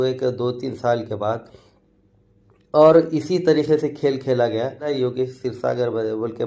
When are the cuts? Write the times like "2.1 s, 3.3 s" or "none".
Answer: 4.9 s